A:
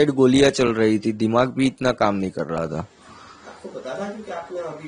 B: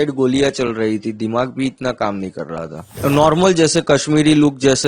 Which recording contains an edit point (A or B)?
B